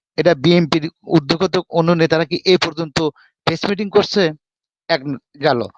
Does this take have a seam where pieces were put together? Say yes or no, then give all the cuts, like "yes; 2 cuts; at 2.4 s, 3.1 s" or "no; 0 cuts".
no; 0 cuts